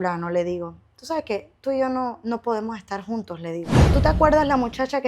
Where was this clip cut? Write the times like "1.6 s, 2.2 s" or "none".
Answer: 3.8 s